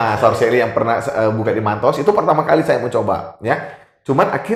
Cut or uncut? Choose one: uncut